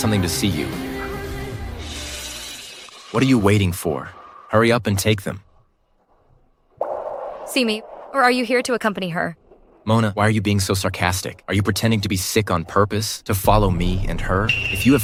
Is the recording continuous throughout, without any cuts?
yes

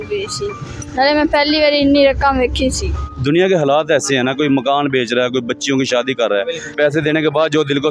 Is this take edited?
yes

